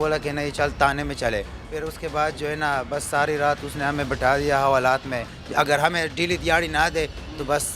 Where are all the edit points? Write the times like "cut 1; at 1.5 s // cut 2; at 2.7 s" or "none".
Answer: cut 1; at 1.6 s // cut 2; at 5.4 s